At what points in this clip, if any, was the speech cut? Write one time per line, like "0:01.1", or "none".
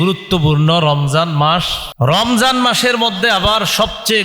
0:01.8